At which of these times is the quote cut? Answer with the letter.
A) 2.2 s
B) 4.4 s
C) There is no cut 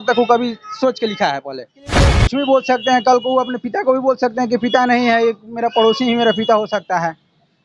A